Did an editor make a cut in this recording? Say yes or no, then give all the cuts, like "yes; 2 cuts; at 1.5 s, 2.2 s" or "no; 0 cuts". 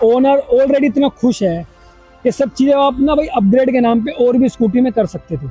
no; 0 cuts